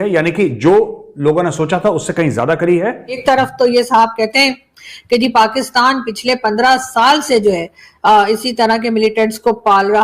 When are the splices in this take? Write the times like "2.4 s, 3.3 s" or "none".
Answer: 3.2 s